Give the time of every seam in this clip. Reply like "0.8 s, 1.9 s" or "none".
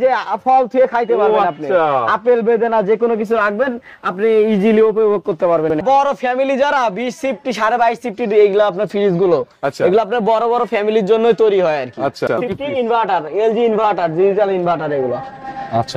5.8 s, 12.5 s